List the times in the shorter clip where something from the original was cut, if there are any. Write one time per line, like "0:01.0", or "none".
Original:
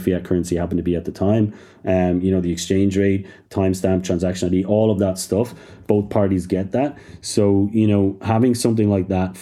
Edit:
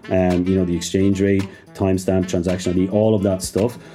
none